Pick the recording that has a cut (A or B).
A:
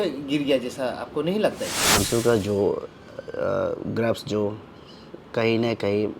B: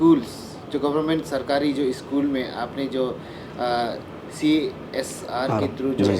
A